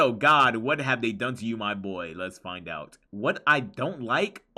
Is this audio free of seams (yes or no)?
yes